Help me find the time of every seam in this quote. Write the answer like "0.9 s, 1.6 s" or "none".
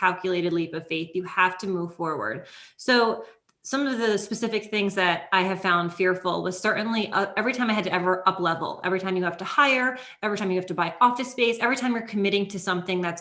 none